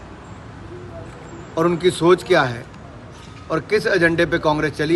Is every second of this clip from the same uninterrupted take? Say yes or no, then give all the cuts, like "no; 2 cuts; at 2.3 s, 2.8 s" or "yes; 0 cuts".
yes; 0 cuts